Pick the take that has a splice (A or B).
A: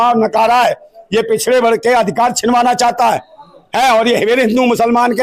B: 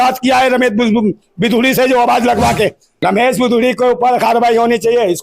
B